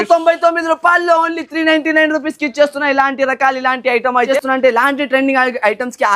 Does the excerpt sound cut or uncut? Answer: cut